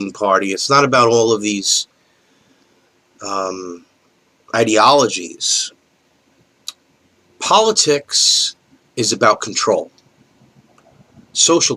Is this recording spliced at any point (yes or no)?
no